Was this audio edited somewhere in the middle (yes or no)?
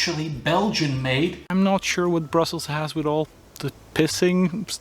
yes